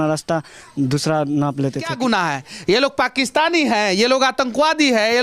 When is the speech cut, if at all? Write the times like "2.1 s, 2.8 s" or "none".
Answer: 1.9 s